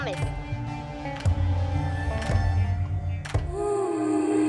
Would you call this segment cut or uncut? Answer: cut